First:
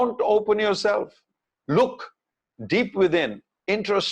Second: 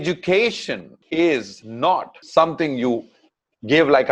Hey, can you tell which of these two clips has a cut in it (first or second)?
second